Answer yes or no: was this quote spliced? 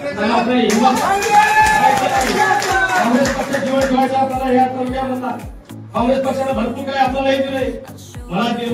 no